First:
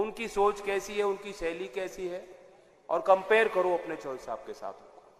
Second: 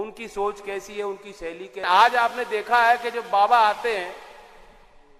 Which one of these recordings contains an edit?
second; 1 cut; at 1.8 s

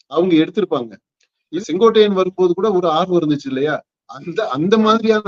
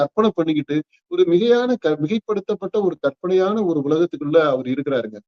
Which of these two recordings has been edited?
first; 1 cut; at 1.5 s

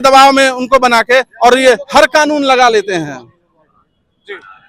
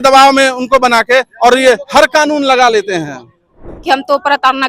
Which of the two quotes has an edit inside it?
second; 1 cut; at 3.7 s

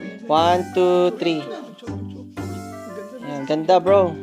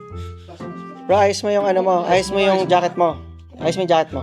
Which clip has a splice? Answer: second; 1 cut; at 1.0 s

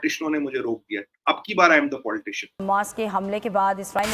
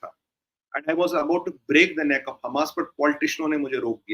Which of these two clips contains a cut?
first; 1 cut; at 2.6 s

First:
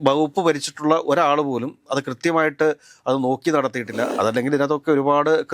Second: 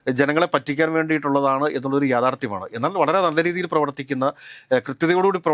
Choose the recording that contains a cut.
first; 1 cut; at 4.1 s

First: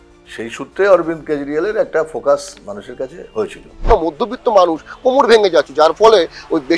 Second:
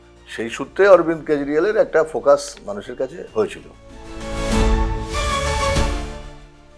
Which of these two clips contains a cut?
first; 1 cut; at 3.8 s

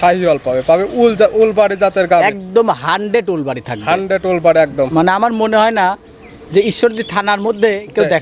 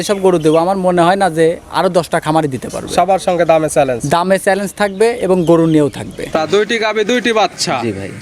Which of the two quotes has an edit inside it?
second; 1 cut; at 6.3 s

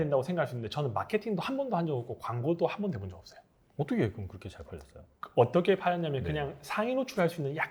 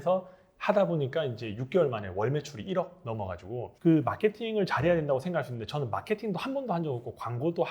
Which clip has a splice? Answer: second; 1 cut; at 3.7 s

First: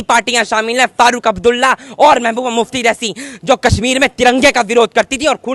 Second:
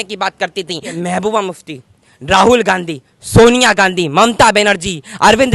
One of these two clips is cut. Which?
second; 1 cut; at 1.0 s

